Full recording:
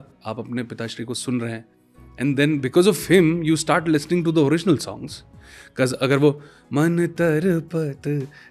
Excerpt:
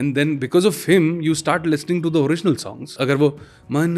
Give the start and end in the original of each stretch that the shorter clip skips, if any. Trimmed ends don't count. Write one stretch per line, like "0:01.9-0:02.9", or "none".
0:05.2-0:06.0